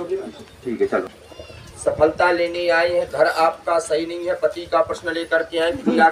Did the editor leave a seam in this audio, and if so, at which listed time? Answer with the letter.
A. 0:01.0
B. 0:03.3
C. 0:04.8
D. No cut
A